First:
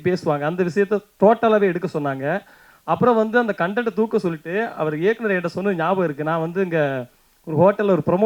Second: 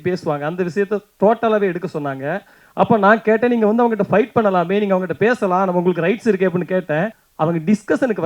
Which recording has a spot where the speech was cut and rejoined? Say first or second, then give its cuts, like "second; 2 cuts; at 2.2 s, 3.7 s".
second; 2 cuts; at 2.6 s, 7.2 s